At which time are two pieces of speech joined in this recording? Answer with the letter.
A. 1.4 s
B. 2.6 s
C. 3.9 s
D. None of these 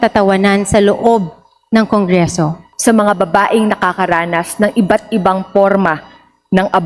B